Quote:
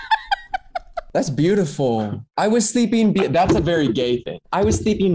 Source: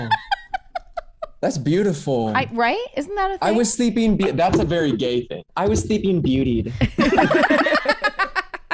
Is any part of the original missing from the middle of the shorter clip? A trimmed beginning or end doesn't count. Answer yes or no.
yes